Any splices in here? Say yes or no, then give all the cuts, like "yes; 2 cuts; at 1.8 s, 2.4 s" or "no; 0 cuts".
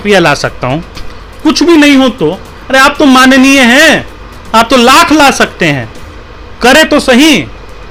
no; 0 cuts